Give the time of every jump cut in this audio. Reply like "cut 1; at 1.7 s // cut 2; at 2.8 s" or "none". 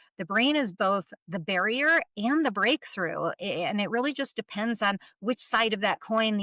none